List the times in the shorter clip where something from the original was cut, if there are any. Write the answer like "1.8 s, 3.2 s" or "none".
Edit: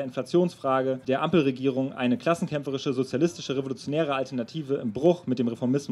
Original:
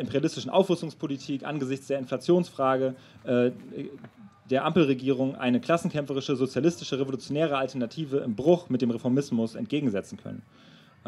1.0 s